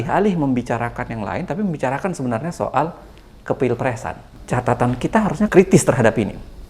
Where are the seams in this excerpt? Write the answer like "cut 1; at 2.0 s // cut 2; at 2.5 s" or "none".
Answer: cut 1; at 4.3 s // cut 2; at 5.5 s